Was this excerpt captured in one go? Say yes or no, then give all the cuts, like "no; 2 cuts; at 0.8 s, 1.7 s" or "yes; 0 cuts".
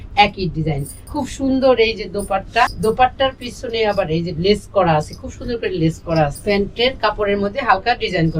no; 3 cuts; at 0.9 s, 2.7 s, 6.4 s